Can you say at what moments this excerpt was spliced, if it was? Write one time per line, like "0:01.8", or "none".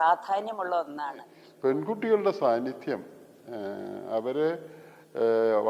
0:01.3